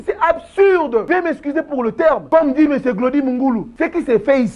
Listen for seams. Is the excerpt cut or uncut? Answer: cut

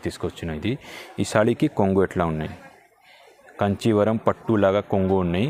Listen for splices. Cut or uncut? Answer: uncut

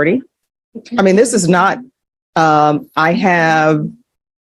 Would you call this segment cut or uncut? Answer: uncut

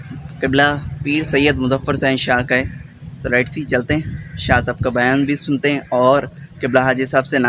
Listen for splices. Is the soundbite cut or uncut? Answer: uncut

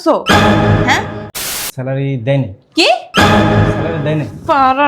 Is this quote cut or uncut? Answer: cut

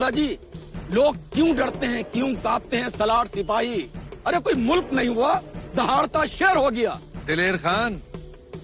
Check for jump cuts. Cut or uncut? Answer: cut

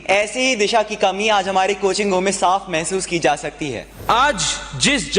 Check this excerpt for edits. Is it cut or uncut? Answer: cut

